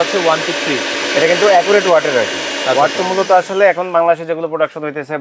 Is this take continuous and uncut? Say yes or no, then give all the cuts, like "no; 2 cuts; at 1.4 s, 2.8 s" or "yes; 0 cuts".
yes; 0 cuts